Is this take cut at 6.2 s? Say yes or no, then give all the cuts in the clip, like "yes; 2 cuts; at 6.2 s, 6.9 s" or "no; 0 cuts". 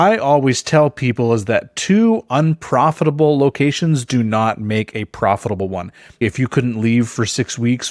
yes; 1 cut; at 6.2 s